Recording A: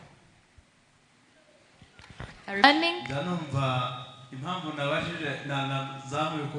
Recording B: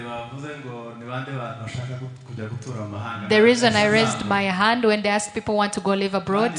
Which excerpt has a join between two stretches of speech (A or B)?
A